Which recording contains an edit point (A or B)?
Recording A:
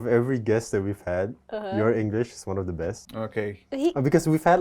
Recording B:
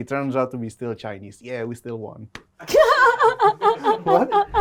A